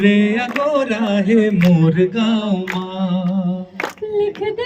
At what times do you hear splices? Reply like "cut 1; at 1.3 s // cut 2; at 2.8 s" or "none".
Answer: none